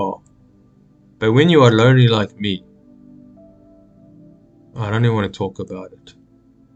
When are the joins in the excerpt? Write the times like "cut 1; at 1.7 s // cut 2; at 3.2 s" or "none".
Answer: none